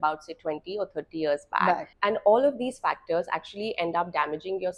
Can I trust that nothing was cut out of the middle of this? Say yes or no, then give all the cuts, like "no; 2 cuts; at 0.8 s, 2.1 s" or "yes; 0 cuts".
no; 1 cut; at 1.9 s